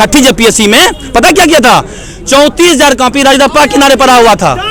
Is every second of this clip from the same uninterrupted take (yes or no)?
yes